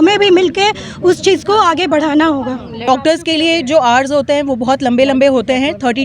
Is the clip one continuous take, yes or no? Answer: no